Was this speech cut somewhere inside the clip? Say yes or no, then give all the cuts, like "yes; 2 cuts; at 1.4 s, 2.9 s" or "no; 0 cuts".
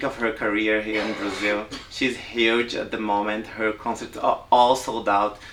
no; 0 cuts